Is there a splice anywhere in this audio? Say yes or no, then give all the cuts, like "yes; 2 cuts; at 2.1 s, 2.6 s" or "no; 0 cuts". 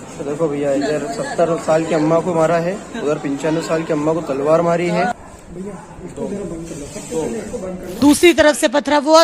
yes; 2 cuts; at 5.1 s, 8.0 s